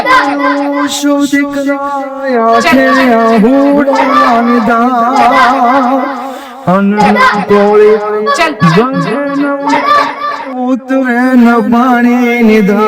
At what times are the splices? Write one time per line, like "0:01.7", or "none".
none